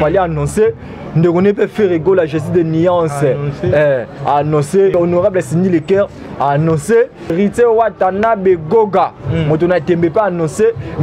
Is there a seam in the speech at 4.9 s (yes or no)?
yes